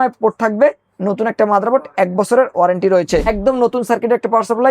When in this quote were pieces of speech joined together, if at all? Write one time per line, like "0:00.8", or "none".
0:03.3